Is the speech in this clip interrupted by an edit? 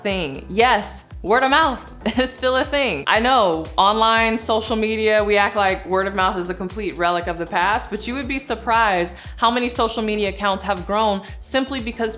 yes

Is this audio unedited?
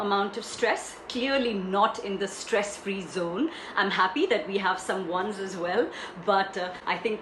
yes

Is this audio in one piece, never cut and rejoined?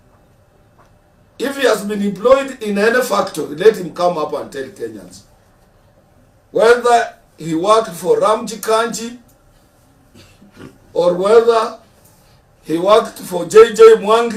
yes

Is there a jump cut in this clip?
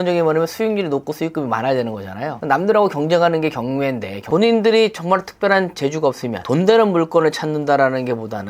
yes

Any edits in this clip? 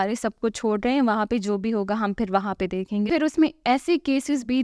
yes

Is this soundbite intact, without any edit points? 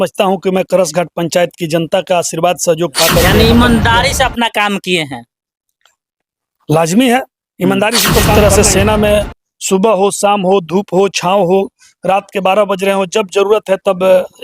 no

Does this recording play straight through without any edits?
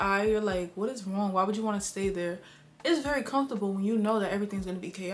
yes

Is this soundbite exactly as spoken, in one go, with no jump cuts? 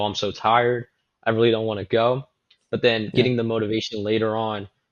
yes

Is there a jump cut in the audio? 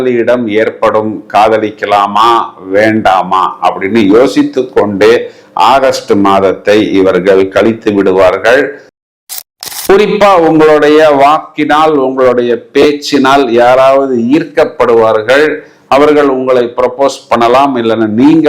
yes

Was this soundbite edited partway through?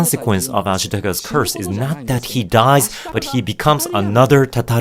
no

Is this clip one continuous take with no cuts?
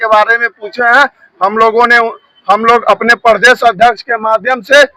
yes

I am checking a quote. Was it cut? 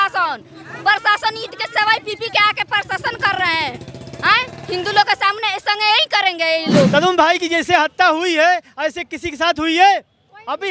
yes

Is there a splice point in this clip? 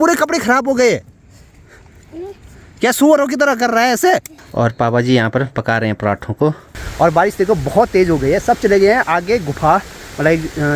yes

